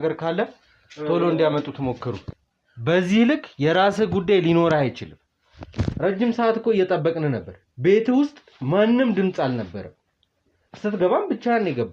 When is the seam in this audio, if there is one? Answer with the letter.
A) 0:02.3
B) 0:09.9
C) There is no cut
A